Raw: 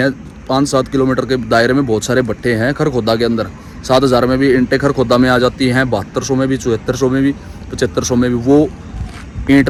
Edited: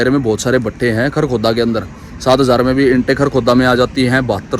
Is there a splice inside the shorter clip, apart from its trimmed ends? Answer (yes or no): no